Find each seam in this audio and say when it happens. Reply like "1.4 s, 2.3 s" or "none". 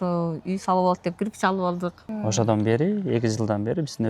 2.1 s